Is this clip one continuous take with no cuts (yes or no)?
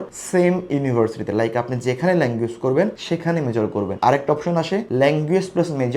yes